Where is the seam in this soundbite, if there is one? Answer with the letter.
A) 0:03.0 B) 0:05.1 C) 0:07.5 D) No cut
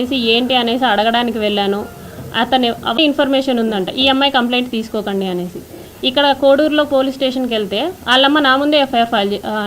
A